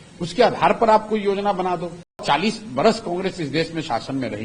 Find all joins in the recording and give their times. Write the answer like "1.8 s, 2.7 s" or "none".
2.2 s